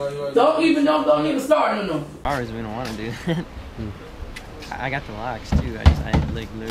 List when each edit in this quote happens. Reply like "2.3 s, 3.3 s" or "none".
2.2 s